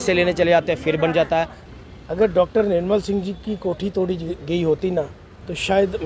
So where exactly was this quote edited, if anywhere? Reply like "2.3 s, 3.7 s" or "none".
1.6 s